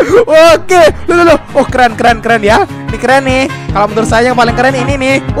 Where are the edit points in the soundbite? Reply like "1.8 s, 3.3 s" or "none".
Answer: none